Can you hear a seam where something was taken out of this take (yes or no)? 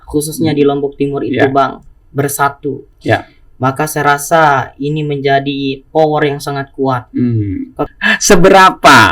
yes